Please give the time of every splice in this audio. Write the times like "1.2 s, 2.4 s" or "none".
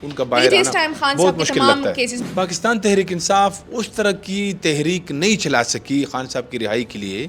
2.2 s